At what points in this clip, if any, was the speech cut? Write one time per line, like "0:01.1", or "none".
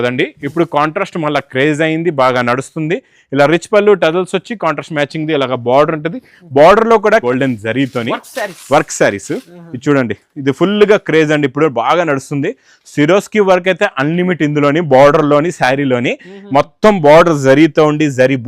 0:07.2